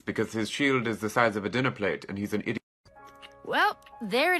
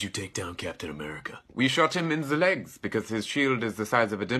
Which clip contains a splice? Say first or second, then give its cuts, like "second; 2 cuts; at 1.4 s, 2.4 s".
first; 1 cut; at 2.8 s